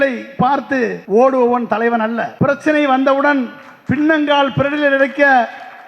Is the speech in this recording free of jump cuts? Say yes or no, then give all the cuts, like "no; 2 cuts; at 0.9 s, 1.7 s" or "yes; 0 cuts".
no; 2 cuts; at 1.0 s, 2.3 s